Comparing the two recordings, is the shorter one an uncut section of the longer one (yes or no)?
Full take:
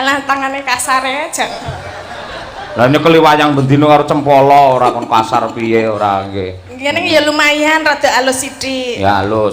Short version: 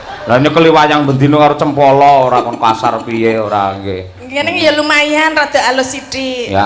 yes